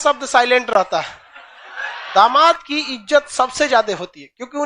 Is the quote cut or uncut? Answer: cut